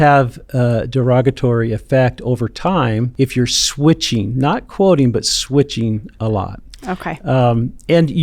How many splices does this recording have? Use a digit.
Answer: 1